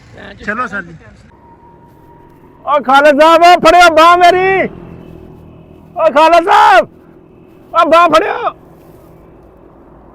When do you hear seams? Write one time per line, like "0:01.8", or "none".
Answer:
0:01.3